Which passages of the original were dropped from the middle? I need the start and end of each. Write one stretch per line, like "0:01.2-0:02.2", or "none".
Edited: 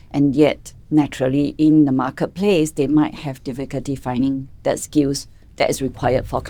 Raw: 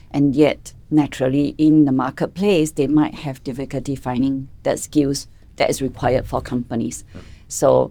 none